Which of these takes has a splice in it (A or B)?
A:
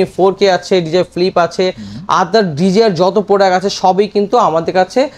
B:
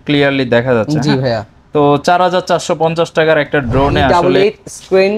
B